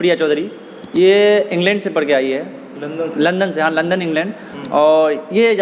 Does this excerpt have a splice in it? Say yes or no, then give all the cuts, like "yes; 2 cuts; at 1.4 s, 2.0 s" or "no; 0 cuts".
no; 0 cuts